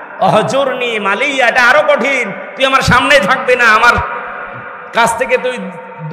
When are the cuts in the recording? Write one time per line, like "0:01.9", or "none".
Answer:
none